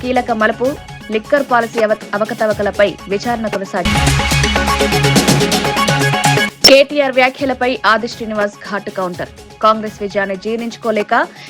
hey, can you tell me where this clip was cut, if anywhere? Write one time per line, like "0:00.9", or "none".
0:03.8